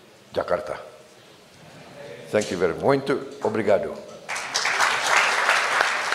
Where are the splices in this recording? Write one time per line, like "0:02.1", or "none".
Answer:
none